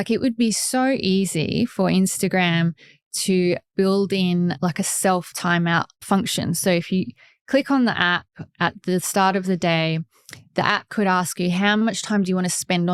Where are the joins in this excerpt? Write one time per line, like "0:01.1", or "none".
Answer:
none

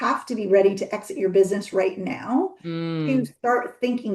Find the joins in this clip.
none

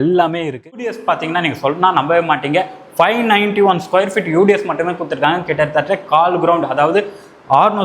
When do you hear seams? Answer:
0:01.0

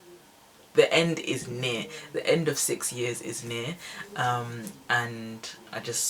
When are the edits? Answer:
none

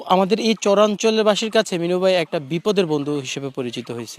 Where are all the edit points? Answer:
none

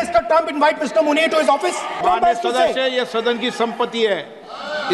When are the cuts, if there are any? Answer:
0:02.0

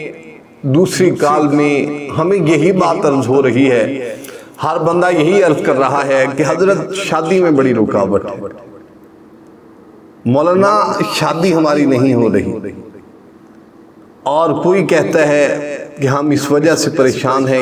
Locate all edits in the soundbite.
none

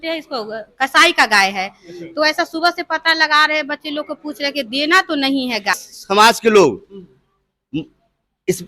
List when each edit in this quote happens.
0:05.9

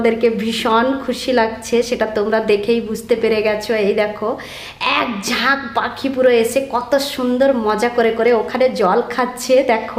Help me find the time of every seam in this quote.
none

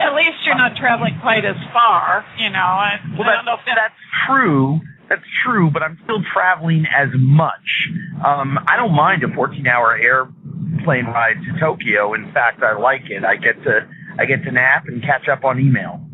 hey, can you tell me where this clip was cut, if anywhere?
0:08.6

